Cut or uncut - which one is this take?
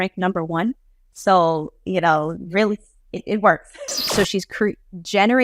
cut